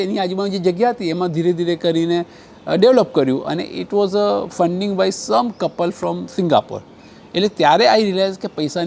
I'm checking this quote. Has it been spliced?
no; 0 cuts

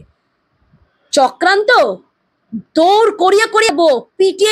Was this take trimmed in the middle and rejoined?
no; 0 cuts

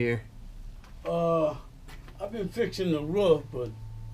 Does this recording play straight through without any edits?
yes; 0 cuts

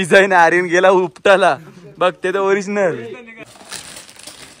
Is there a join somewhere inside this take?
yes; 1 cut; at 3.4 s

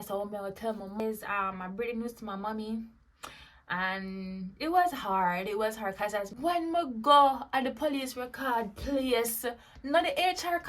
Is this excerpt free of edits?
no; 2 cuts; at 1.0 s, 6.3 s

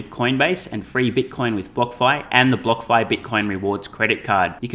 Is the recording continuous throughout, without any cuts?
yes; 0 cuts

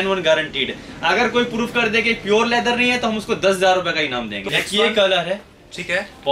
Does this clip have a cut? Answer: yes; 1 cut; at 4.4 s

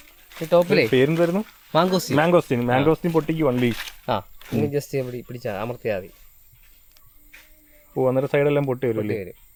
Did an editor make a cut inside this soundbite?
no; 0 cuts

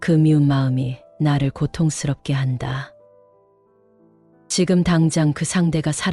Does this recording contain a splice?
no; 0 cuts

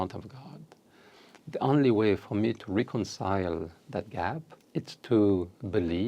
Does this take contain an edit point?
yes; 1 cut; at 4.5 s

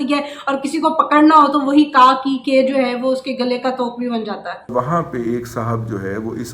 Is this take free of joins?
no; 1 cut; at 4.7 s

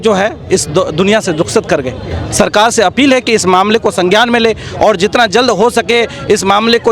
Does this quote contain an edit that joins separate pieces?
no; 0 cuts

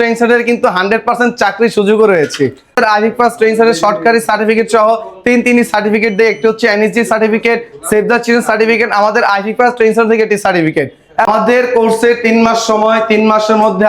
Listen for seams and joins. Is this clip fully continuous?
no; 2 cuts; at 2.7 s, 11.3 s

